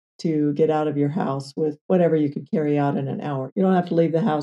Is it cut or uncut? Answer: cut